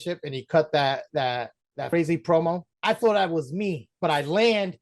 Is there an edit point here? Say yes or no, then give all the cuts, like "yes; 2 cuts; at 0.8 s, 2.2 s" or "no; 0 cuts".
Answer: yes; 3 cuts; at 1.9 s, 2.7 s, 3.9 s